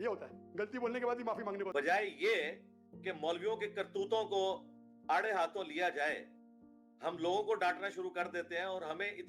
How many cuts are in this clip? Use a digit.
1